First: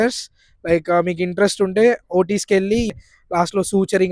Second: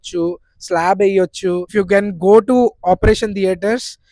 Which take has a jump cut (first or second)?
second